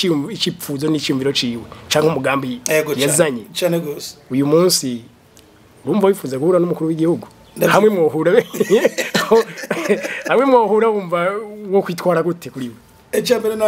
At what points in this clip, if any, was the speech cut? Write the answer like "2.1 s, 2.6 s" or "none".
none

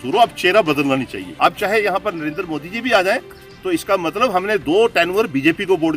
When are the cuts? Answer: none

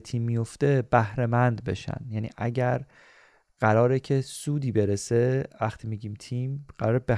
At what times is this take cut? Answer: none

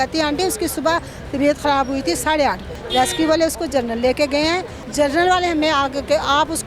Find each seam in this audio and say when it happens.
2.7 s, 4.8 s

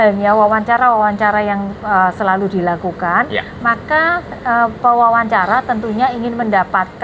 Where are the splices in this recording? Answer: none

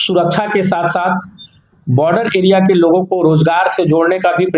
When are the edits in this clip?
none

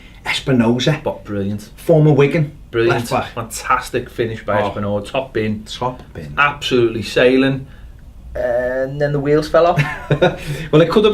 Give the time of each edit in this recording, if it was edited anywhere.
4.3 s

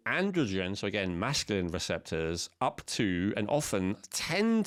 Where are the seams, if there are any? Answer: none

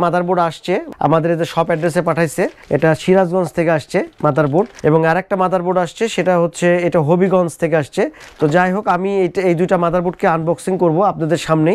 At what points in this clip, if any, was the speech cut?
none

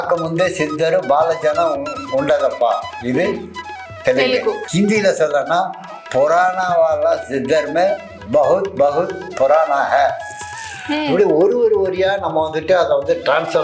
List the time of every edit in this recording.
4.6 s

